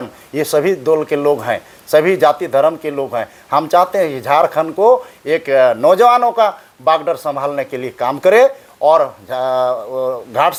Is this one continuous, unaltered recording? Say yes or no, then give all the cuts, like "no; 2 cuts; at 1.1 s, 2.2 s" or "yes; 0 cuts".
yes; 0 cuts